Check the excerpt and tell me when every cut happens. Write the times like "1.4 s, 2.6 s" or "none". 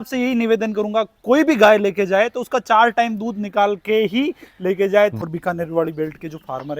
5.2 s